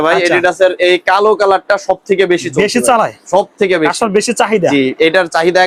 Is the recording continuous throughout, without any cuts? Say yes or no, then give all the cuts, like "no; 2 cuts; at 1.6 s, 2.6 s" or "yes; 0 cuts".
yes; 0 cuts